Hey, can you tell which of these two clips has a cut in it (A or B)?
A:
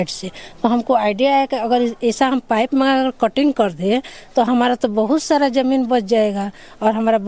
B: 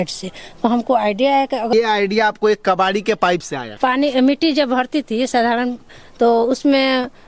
B